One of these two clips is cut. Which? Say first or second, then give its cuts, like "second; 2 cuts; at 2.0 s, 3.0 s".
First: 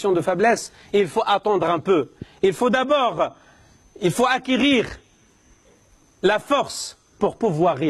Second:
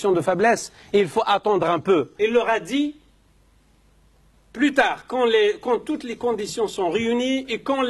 second; 1 cut; at 2.1 s